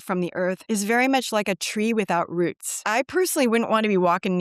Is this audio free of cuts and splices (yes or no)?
no